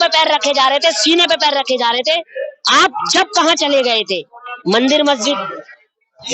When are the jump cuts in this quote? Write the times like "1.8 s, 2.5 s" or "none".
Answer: 4.3 s

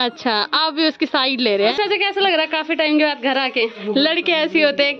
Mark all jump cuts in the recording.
1.7 s, 3.8 s

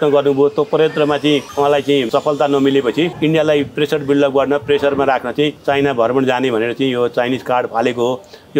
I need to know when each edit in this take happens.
2.0 s, 3.1 s, 5.6 s

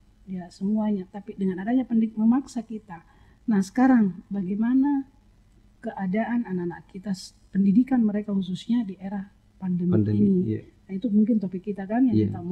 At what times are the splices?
none

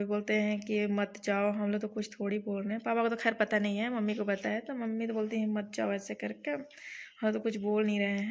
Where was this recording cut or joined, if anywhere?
none

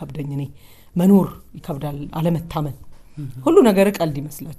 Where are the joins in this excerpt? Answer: none

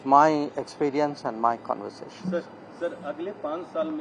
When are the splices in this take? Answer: none

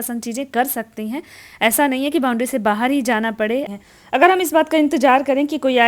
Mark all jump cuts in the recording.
3.7 s

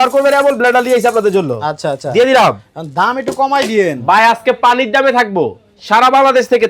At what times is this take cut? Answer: none

